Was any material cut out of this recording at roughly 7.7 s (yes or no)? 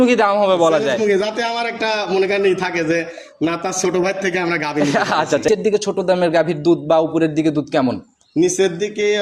no